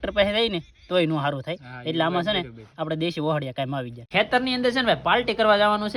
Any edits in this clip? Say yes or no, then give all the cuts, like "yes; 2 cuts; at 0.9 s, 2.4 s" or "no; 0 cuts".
yes; 1 cut; at 4.0 s